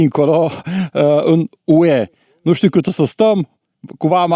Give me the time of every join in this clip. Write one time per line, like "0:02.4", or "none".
none